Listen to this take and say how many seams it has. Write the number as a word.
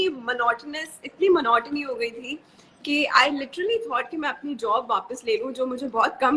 zero